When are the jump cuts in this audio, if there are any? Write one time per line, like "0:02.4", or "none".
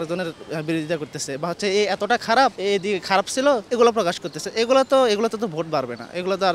0:02.6
0:03.6